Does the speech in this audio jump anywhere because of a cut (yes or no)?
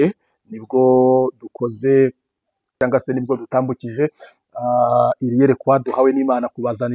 yes